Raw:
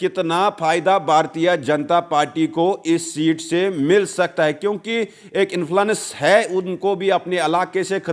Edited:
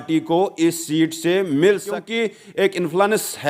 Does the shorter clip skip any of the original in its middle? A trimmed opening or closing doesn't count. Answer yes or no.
yes